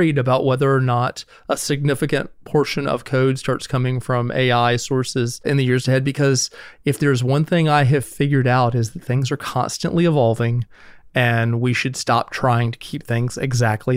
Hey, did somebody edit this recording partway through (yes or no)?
yes